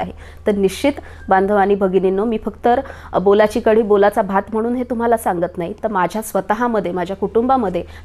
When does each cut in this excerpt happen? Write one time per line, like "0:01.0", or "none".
none